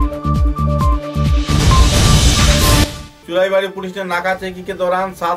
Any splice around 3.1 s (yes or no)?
yes